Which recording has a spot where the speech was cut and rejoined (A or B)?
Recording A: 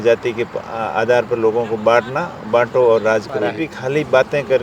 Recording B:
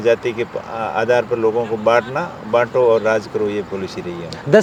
A